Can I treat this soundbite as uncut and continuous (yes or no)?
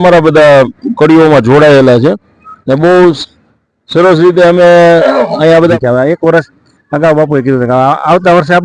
no